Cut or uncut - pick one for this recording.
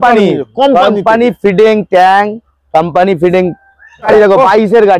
cut